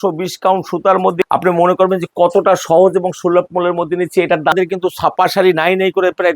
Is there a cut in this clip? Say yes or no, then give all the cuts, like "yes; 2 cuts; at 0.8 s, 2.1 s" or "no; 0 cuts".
yes; 2 cuts; at 1.3 s, 4.5 s